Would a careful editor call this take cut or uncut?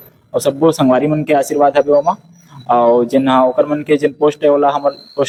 uncut